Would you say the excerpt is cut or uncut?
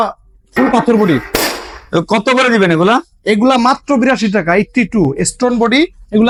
uncut